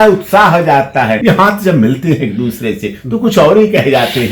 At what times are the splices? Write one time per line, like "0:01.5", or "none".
0:01.2